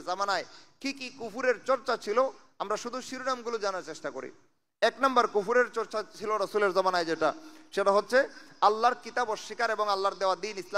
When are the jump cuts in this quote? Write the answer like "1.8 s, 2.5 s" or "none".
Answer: none